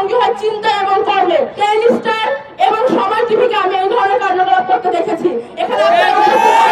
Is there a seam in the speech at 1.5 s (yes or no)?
yes